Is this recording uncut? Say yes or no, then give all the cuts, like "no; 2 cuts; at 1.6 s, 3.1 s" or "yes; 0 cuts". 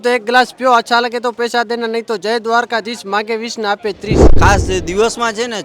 no; 1 cut; at 4.3 s